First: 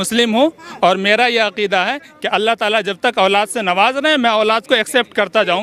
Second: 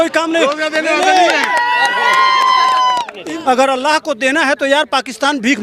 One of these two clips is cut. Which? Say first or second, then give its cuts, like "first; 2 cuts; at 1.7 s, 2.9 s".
second; 1 cut; at 3.1 s